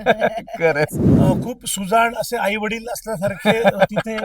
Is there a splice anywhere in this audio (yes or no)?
yes